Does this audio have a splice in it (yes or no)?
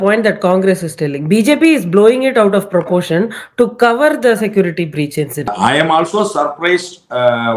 yes